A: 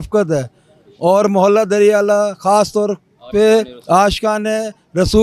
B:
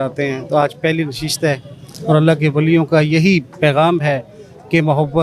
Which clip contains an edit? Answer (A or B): B